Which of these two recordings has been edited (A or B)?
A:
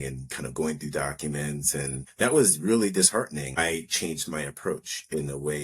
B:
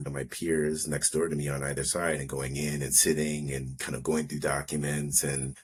A